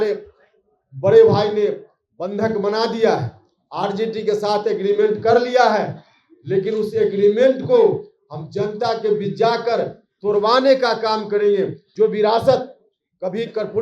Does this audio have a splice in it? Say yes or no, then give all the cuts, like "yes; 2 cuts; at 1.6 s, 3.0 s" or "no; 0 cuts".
yes; 1 cut; at 11.8 s